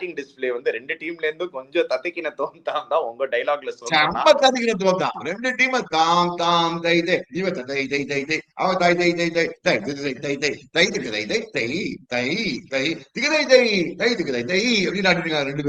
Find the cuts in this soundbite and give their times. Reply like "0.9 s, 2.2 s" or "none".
none